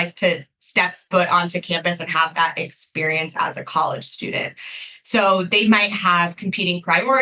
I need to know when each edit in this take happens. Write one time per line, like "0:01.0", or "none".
none